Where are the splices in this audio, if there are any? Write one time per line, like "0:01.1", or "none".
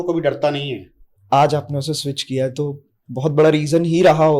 0:01.1